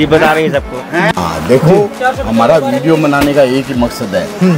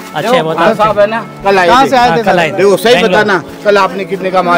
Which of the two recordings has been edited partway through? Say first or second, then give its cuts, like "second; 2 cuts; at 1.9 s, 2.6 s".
first; 1 cut; at 1.1 s